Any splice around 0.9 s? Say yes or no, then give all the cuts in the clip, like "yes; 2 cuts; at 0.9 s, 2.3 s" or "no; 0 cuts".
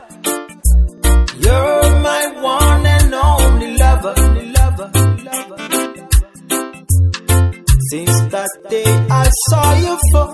yes; 1 cut; at 0.9 s